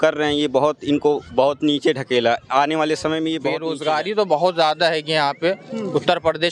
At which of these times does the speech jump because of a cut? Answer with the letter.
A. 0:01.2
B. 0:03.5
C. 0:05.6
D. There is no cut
B